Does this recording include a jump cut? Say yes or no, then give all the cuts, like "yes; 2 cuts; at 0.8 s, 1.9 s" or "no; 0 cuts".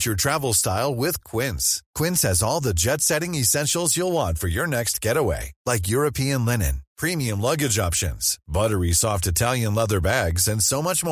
no; 0 cuts